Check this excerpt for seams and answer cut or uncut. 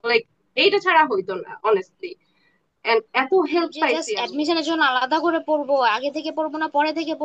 cut